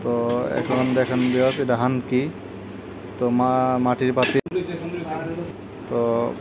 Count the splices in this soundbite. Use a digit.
1